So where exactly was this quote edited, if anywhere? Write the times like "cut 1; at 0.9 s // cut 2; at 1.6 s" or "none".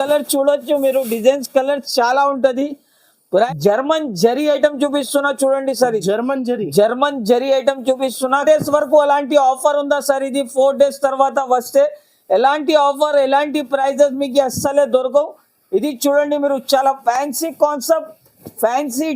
cut 1; at 3.2 s // cut 2; at 8.4 s